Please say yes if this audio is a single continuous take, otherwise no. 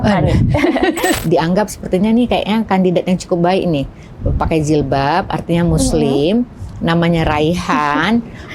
no